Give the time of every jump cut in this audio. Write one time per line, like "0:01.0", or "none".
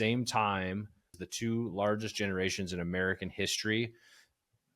0:01.1